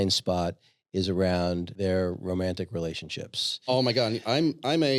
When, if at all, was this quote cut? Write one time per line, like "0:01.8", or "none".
0:01.7
0:03.7